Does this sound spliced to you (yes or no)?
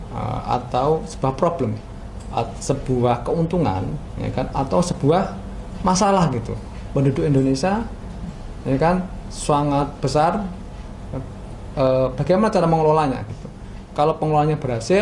no